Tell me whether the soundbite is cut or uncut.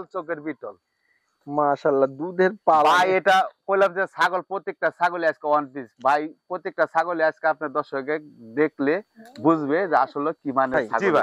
uncut